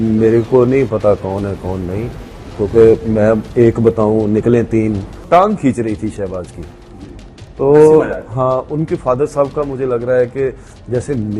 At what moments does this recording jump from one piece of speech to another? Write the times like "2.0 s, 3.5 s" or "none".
5.2 s